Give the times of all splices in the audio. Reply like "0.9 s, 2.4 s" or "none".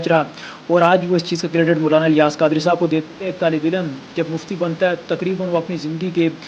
3.1 s

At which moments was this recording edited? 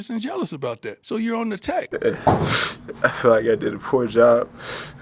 0.9 s, 1.9 s

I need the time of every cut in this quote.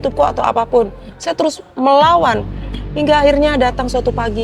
none

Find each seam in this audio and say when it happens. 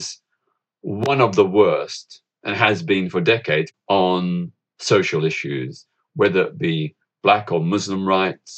3.7 s

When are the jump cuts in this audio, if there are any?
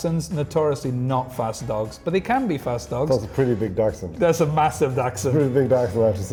none

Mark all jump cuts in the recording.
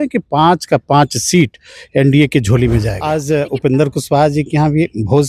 3.0 s

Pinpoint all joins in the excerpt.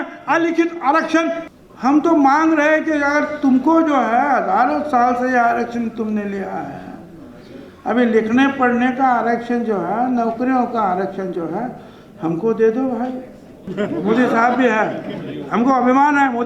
1.4 s, 13.6 s

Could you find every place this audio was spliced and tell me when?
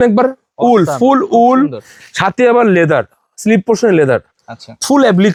none

